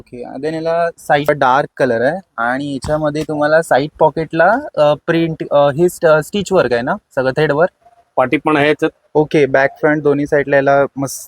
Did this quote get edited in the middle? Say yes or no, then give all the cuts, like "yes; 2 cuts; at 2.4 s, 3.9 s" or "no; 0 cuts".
yes; 2 cuts; at 1.3 s, 7.8 s